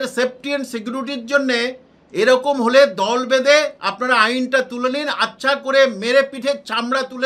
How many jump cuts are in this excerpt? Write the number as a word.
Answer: zero